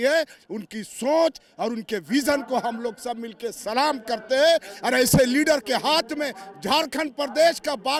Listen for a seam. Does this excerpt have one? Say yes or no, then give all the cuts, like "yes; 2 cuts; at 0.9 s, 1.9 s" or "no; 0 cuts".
no; 0 cuts